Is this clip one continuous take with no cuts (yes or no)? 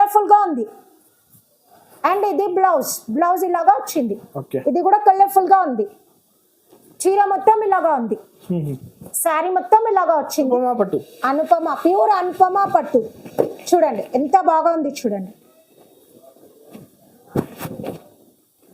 no